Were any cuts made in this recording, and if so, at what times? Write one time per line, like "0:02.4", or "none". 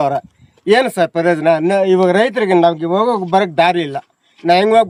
none